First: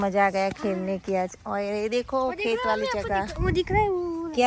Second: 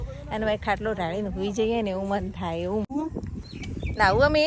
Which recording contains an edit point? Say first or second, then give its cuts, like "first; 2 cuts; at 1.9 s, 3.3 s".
second; 1 cut; at 2.9 s